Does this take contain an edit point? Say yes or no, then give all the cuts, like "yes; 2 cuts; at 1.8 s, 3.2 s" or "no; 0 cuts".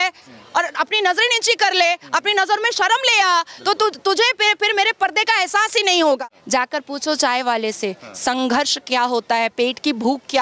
yes; 1 cut; at 6.2 s